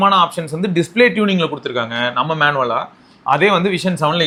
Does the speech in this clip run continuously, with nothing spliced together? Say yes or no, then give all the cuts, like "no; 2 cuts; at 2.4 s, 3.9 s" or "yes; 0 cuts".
yes; 0 cuts